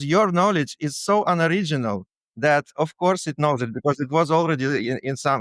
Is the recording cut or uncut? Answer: uncut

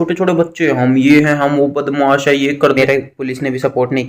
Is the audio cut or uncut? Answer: cut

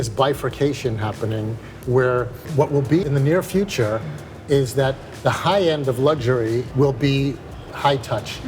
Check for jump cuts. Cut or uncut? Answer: cut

